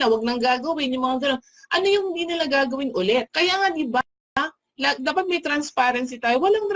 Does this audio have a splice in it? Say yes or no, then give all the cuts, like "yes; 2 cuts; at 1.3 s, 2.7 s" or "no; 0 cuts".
yes; 1 cut; at 3.3 s